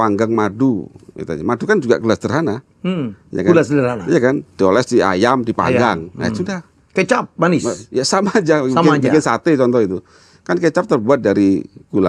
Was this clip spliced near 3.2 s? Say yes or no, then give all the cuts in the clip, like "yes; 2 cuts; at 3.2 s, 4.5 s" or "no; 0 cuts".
no; 0 cuts